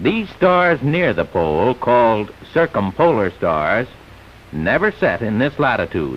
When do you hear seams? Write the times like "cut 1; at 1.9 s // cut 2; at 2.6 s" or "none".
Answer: cut 1; at 1.8 s